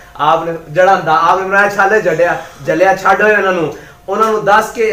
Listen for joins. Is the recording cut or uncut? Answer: uncut